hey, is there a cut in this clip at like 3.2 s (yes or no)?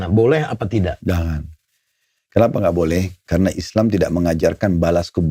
no